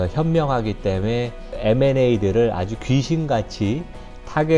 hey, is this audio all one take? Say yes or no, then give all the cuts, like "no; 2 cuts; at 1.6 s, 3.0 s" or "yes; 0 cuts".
no; 1 cut; at 1.5 s